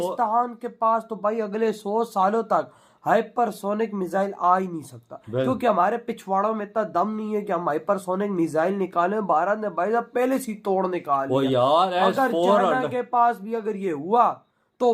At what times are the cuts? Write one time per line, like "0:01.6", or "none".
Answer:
none